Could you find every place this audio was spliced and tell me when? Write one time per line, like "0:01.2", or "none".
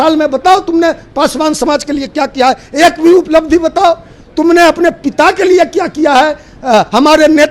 none